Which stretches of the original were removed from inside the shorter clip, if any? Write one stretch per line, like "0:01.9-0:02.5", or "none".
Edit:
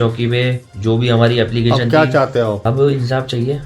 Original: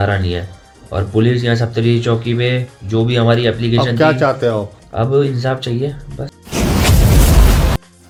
0:04.7-0:04.9